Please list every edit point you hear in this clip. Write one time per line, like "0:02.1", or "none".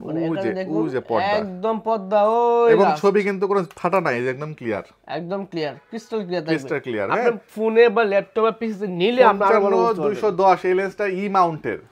none

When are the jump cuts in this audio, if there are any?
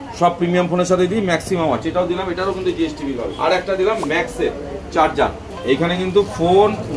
0:03.4
0:05.5

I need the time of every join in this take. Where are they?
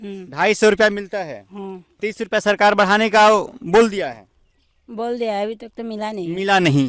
none

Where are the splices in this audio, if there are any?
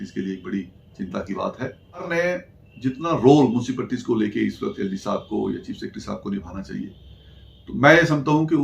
0:02.1

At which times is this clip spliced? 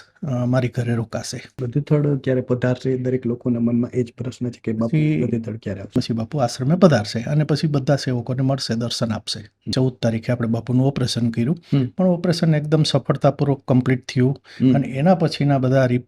0:01.6
0:05.9
0:09.7

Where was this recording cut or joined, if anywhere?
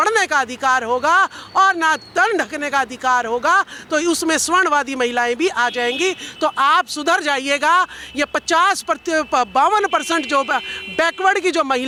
none

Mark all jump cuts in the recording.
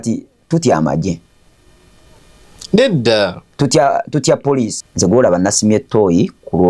0:04.8

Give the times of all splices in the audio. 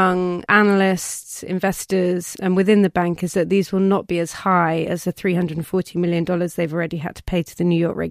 none

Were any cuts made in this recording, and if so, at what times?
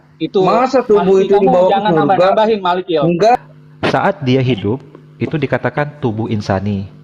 0:03.3

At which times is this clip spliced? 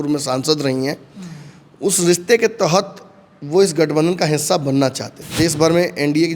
0:05.2

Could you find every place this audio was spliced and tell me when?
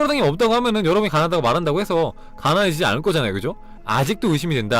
0:03.9

